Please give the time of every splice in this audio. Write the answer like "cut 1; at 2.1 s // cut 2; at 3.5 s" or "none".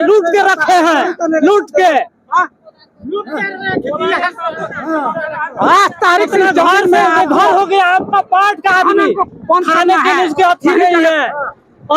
none